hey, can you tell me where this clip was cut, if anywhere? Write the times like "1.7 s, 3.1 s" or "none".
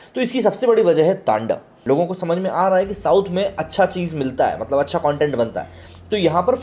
1.7 s